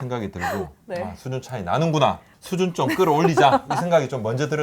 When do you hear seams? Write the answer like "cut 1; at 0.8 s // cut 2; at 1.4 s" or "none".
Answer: cut 1; at 2.3 s